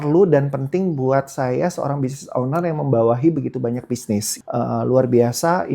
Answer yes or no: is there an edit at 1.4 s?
no